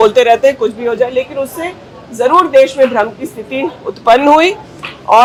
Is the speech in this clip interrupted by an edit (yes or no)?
no